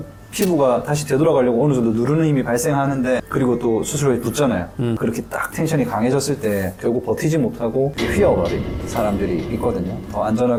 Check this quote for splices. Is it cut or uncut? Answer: uncut